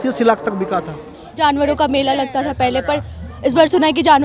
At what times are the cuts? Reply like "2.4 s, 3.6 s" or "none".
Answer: 1.2 s